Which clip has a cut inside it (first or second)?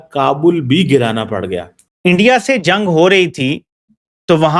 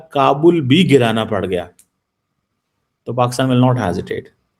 first